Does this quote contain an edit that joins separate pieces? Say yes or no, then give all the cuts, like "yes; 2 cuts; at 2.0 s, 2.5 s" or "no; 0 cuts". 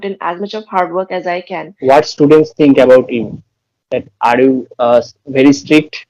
yes; 1 cut; at 1.7 s